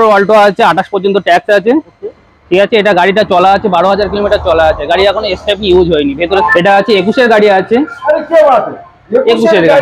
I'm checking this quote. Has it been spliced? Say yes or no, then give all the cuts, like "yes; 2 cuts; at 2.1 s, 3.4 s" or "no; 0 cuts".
yes; 1 cut; at 6.4 s